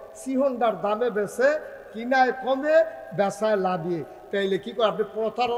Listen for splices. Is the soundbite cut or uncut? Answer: uncut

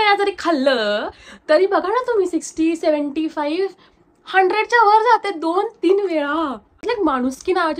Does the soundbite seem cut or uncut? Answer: cut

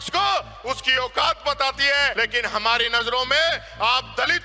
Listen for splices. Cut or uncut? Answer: cut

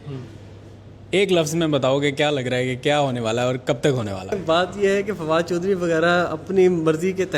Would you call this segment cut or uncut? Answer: cut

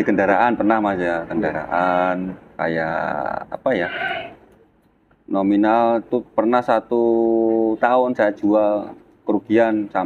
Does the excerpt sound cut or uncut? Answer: uncut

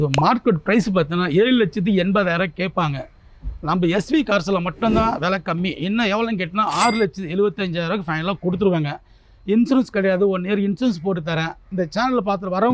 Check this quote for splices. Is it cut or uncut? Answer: uncut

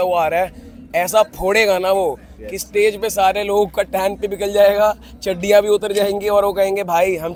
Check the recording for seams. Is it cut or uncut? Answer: uncut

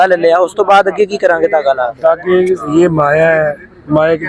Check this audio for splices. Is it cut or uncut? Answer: uncut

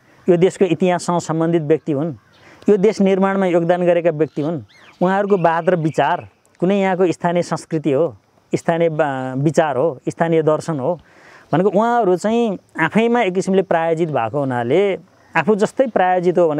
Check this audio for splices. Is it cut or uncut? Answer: uncut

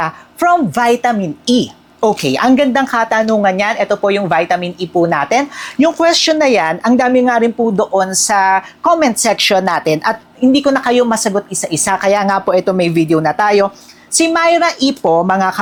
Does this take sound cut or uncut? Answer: uncut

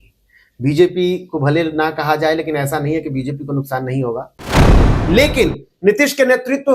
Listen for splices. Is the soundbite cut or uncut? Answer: cut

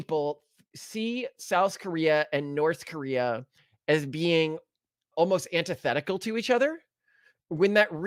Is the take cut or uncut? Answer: uncut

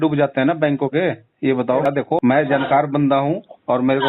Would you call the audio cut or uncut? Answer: cut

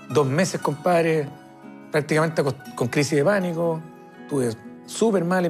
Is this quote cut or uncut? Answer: uncut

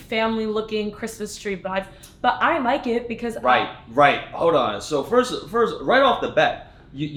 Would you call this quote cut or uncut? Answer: uncut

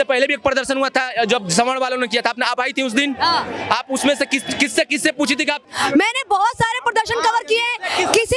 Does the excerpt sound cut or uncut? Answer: cut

